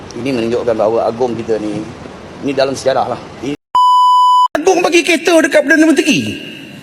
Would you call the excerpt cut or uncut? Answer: cut